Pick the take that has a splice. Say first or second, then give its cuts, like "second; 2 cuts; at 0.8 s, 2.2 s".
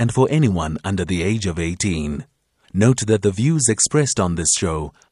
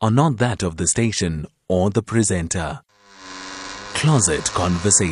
second; 1 cut; at 3.0 s